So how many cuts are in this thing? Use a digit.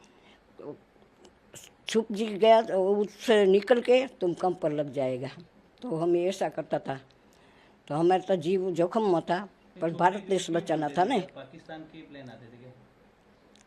0